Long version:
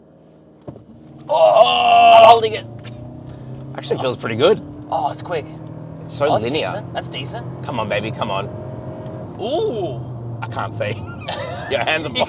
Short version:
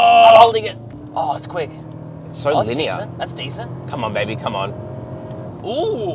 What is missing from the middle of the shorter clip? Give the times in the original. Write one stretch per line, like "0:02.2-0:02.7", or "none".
0:02.9-0:04.7